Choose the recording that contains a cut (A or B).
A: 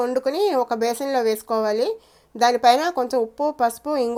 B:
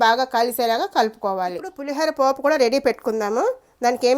B